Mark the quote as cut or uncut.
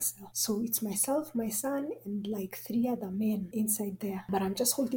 cut